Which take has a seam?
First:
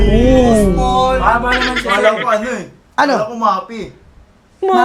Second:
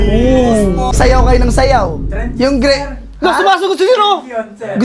second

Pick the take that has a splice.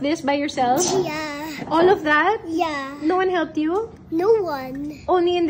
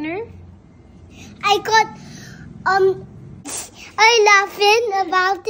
second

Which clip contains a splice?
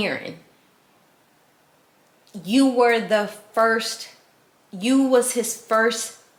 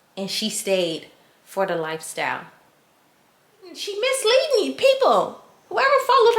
second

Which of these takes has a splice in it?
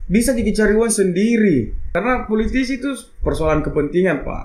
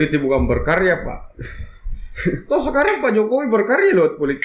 first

